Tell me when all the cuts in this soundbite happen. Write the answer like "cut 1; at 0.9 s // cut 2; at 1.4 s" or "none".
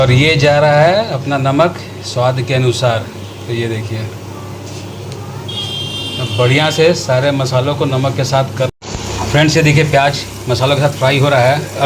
cut 1; at 8.7 s